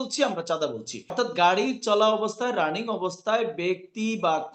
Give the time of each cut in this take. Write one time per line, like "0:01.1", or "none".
0:01.1